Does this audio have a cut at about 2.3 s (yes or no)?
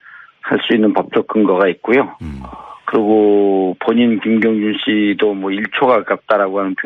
yes